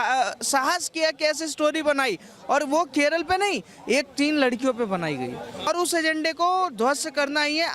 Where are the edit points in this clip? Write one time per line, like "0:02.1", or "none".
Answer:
0:05.7

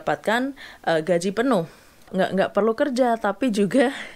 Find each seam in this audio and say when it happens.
0:02.1

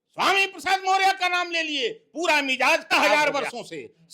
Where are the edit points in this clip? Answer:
0:02.9

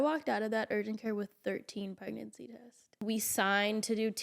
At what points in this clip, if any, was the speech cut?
0:03.0

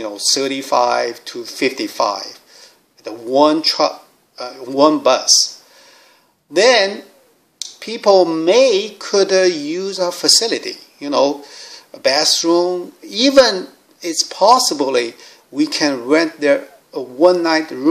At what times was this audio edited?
0:03.6

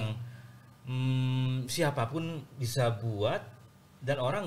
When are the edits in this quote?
none

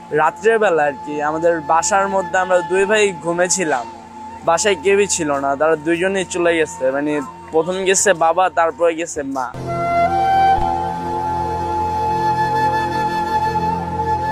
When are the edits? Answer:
none

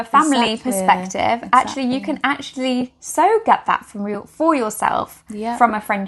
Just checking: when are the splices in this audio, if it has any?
none

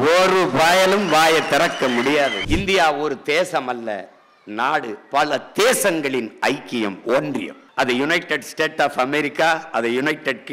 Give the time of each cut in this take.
0:02.4

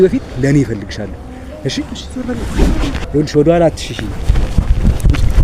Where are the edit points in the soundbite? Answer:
0:02.9

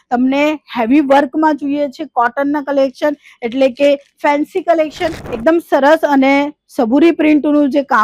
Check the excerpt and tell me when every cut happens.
0:05.2

